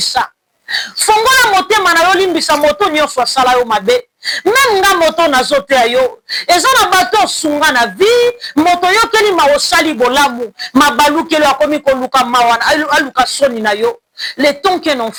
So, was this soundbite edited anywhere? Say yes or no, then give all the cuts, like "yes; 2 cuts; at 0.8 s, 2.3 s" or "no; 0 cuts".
no; 0 cuts